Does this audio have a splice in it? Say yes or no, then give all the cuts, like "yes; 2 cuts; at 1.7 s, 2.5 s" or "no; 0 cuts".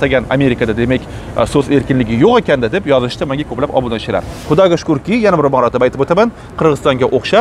yes; 1 cut; at 4.3 s